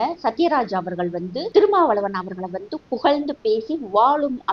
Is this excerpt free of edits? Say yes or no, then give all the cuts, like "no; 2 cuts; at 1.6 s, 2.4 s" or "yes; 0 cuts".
no; 1 cut; at 1.4 s